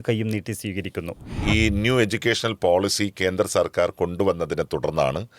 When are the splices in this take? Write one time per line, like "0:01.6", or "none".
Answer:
0:01.4